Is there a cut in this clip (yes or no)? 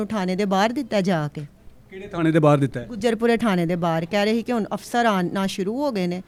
no